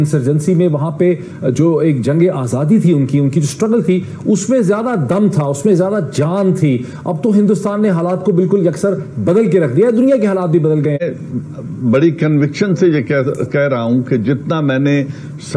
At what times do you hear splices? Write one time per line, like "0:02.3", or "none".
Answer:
0:11.0

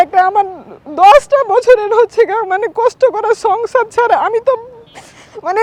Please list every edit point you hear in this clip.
none

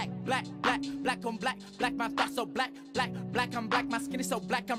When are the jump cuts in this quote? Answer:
none

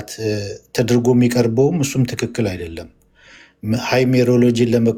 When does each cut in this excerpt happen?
none

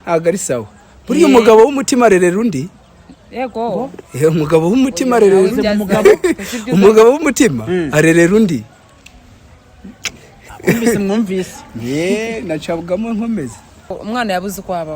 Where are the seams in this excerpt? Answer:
0:13.9

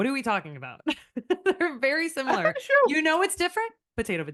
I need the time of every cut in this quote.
none

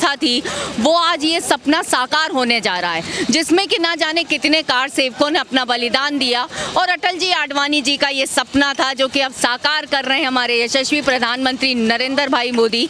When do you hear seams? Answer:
none

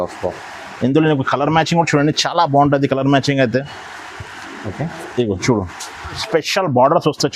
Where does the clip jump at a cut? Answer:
0:06.2

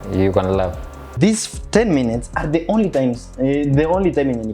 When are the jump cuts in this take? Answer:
0:01.1

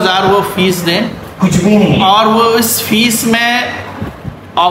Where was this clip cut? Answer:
none

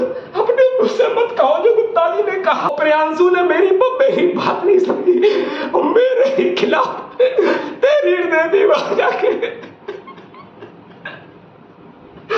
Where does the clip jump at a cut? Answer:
0:02.7

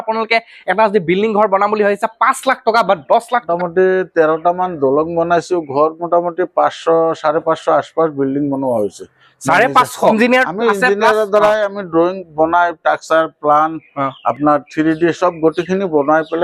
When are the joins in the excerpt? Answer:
0:03.5
0:10.1

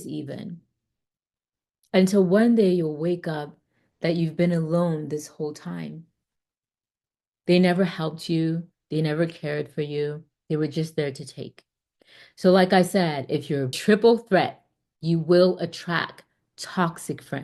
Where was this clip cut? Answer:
0:13.8

